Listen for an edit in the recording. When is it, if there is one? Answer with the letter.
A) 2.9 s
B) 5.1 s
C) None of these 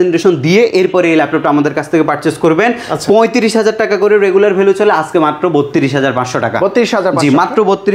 C